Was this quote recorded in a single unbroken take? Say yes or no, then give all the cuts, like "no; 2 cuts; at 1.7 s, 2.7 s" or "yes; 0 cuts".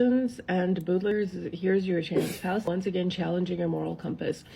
no; 2 cuts; at 1.1 s, 2.6 s